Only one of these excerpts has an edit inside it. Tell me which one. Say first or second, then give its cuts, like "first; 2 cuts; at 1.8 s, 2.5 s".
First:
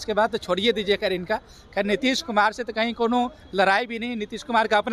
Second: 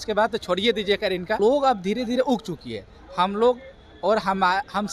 second; 1 cut; at 1.4 s